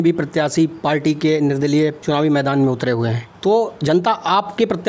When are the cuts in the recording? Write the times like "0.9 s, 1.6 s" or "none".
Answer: 2.0 s, 3.2 s